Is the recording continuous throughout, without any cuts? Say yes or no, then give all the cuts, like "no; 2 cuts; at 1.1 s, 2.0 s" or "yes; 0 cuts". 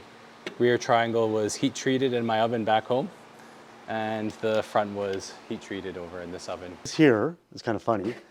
no; 1 cut; at 6.8 s